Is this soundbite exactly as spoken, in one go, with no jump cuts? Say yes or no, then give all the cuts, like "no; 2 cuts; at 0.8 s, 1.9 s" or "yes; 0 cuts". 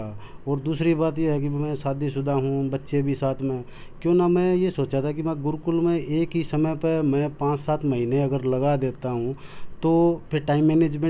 yes; 0 cuts